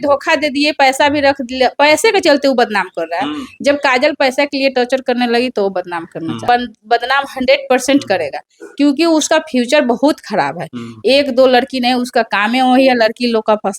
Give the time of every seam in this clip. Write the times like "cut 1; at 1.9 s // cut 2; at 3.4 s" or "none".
cut 1; at 6.4 s